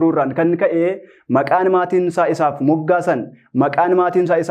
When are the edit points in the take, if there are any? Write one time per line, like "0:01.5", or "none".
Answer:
none